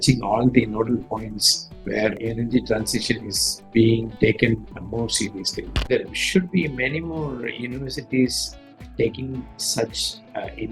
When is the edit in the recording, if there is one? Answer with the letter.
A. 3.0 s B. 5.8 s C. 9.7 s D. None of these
B